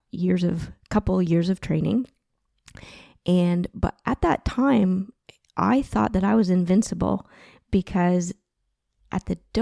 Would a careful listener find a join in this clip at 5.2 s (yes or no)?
no